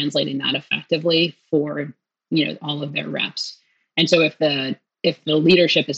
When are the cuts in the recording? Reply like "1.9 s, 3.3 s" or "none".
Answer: none